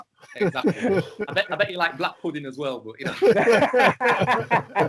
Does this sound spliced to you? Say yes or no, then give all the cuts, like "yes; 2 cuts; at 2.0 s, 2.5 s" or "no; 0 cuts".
no; 0 cuts